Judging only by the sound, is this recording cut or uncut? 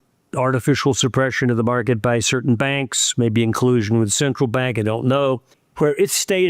uncut